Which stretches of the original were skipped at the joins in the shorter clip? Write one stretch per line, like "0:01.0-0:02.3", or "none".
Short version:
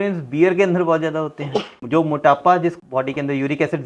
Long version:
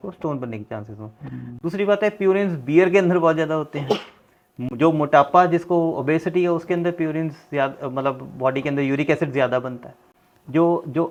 0:04.1-0:04.6
0:05.6-0:08.2